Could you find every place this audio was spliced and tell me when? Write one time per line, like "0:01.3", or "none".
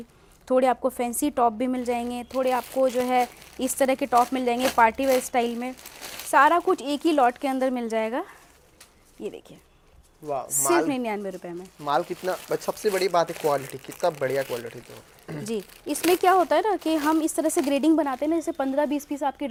none